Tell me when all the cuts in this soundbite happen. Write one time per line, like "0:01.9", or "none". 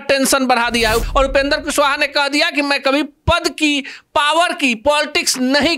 0:01.0